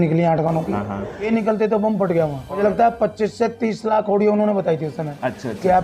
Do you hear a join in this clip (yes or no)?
yes